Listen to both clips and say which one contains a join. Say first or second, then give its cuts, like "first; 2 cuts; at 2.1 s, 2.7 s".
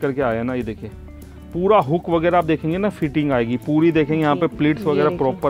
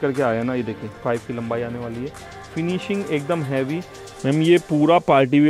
second; 2 cuts; at 1.0 s, 4.1 s